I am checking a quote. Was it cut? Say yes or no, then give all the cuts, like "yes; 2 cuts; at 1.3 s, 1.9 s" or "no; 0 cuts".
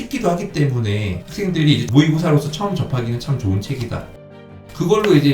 yes; 1 cut; at 4.2 s